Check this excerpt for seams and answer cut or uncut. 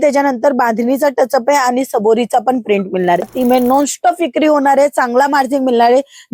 cut